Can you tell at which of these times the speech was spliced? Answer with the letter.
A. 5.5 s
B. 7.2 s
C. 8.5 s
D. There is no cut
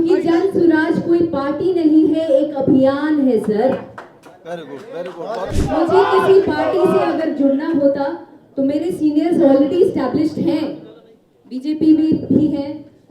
A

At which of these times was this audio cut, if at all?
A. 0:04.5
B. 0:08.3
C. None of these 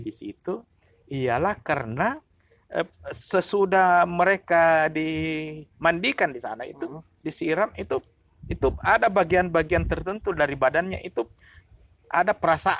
C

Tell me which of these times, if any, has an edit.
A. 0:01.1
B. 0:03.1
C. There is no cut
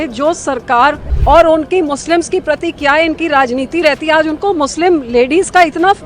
A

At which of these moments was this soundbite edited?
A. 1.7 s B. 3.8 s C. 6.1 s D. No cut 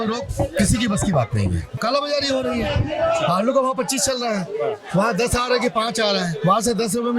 A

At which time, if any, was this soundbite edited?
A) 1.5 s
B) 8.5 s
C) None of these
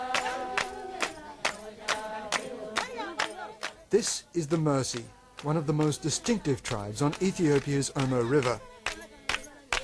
B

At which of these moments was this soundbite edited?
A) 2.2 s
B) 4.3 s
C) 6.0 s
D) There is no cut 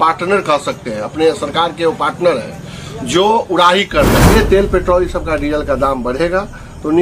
B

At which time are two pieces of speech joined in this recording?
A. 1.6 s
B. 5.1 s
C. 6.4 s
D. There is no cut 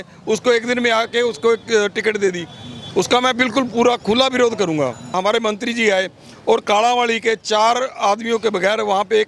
B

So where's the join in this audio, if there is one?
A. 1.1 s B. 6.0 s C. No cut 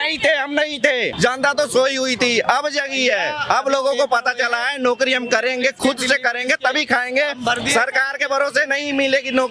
A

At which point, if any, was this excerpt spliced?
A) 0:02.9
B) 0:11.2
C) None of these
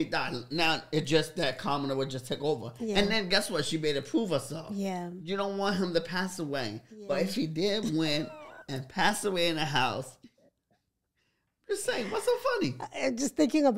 C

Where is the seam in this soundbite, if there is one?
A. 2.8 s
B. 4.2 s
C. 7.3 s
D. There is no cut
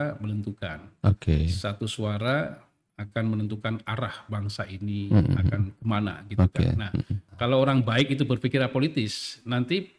C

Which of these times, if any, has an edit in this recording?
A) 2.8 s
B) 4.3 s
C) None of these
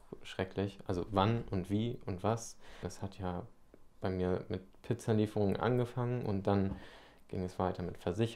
A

